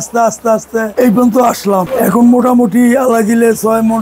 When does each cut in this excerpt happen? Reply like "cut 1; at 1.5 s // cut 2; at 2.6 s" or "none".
cut 1; at 0.9 s // cut 2; at 1.9 s

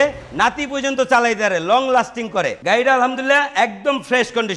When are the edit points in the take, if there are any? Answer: cut 1; at 2.6 s

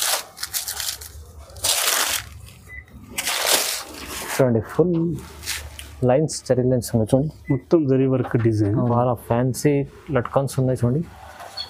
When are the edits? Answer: cut 1; at 8.9 s

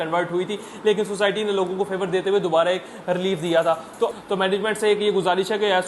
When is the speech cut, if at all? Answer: cut 1; at 4.1 s

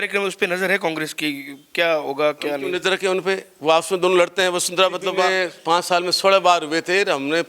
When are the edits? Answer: cut 1; at 5.4 s

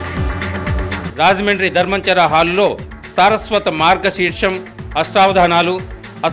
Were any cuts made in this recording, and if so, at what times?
cut 1; at 1.0 s

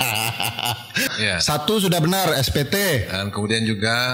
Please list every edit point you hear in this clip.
cut 1; at 1.1 s

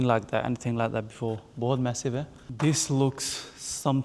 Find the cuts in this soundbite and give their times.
cut 1; at 2.4 s

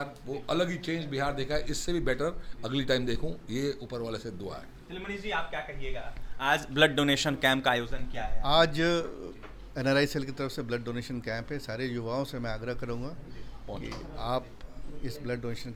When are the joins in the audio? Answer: none

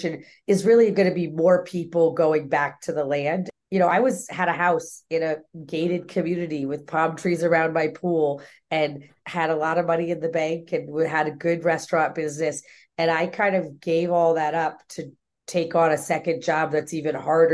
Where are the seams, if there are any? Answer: cut 1; at 3.5 s // cut 2; at 5.5 s

